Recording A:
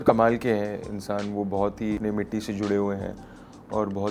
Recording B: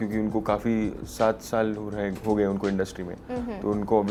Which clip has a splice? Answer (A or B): A